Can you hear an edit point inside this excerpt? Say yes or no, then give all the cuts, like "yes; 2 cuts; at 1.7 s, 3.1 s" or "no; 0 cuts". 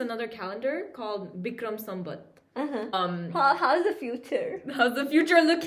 yes; 1 cut; at 2.9 s